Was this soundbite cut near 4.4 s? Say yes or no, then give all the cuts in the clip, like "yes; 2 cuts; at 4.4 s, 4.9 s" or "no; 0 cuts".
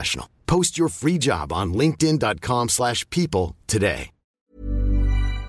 yes; 1 cut; at 4.4 s